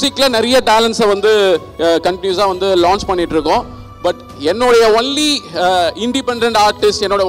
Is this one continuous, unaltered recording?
yes; 0 cuts

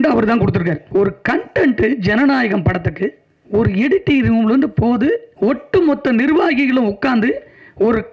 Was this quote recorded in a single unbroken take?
no; 3 cuts; at 0.8 s, 3.3 s, 5.3 s

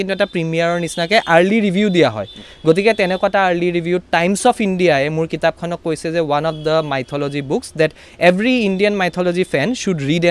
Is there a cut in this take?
no; 0 cuts

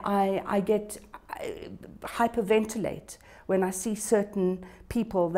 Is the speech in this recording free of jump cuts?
yes; 0 cuts

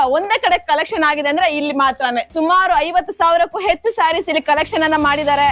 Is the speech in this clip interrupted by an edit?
yes; 1 cut; at 2.3 s

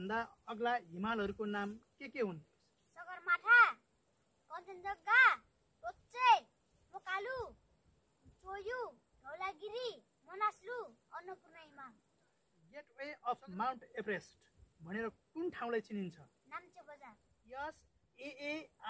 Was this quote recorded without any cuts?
no; 2 cuts; at 12.9 s, 17.3 s

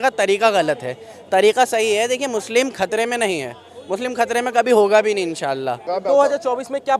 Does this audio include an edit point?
yes; 1 cut; at 5.8 s

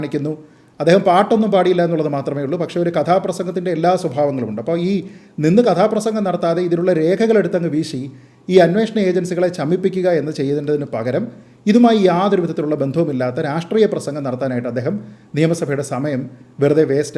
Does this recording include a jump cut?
no; 0 cuts

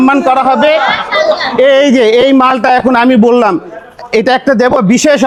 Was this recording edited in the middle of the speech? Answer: no; 0 cuts

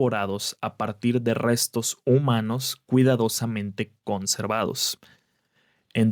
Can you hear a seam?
no; 0 cuts

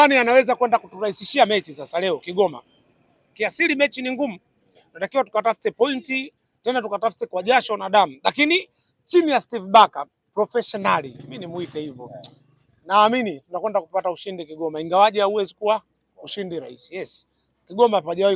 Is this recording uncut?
yes; 0 cuts

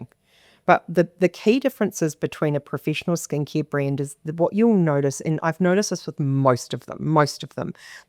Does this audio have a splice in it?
no; 0 cuts

